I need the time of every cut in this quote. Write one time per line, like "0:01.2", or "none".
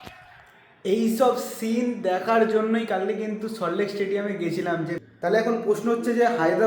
0:05.0